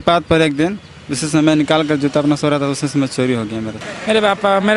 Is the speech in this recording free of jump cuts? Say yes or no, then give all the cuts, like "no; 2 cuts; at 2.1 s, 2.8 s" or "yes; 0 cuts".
no; 1 cut; at 3.8 s